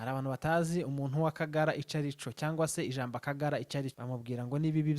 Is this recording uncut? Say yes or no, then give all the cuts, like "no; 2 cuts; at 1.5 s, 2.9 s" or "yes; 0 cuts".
no; 1 cut; at 4.0 s